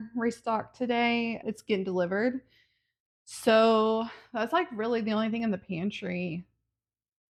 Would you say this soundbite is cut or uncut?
uncut